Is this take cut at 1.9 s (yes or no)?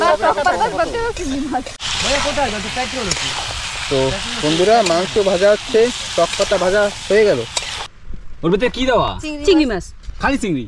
yes